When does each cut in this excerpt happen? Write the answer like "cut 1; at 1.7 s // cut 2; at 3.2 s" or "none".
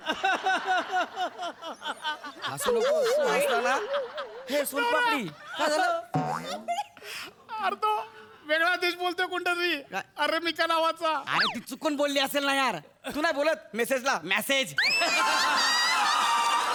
none